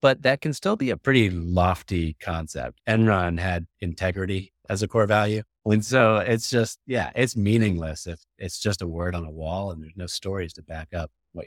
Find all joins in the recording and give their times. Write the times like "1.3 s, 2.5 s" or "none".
2.7 s, 5.5 s